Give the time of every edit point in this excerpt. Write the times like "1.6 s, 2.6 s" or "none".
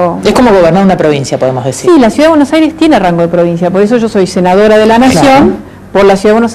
4.5 s